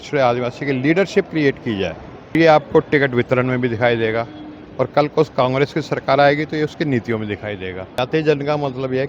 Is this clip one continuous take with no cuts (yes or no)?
no